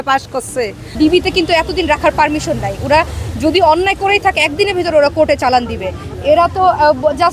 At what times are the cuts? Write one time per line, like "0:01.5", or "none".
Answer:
0:00.9

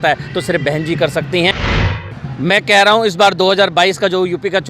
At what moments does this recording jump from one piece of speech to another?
0:01.8

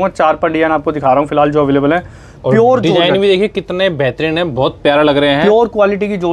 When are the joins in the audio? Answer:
none

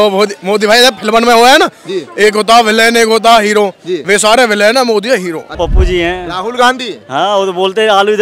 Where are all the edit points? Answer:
0:05.5

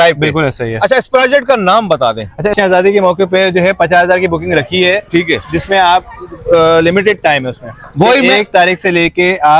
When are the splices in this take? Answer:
0:02.5

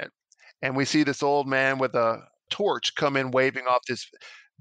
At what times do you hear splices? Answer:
0:02.4

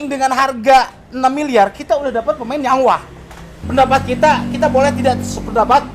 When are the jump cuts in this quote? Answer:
0:03.5

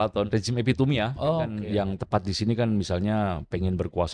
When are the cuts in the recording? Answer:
0:01.6

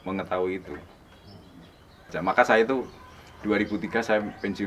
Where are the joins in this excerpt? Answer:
0:02.1

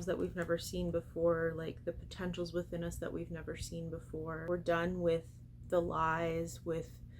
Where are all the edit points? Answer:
0:04.4

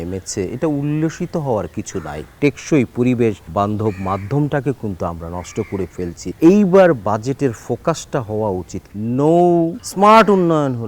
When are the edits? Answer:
0:02.4
0:03.4
0:06.2
0:09.8

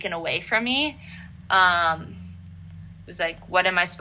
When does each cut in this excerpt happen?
none

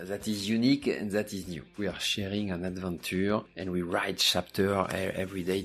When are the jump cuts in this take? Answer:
0:01.8
0:03.5

